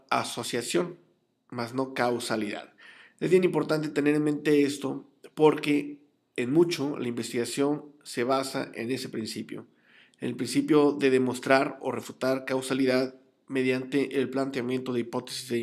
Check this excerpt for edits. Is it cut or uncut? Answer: uncut